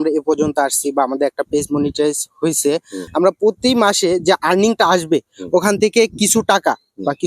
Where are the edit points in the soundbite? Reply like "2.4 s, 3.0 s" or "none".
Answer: 3.0 s